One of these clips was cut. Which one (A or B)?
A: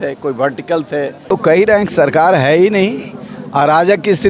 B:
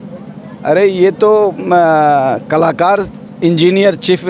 A